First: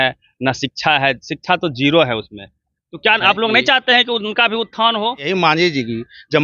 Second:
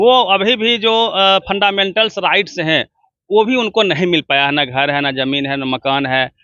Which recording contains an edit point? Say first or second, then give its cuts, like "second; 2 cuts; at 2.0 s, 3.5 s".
first; 1 cut; at 5.3 s